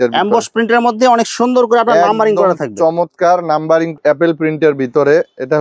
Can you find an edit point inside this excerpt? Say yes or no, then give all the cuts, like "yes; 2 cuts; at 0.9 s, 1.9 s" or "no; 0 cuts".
yes; 1 cut; at 4.0 s